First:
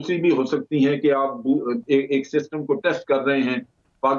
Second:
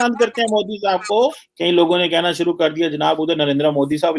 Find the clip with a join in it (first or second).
second